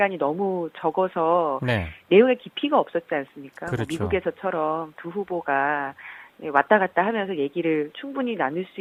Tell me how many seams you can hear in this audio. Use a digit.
0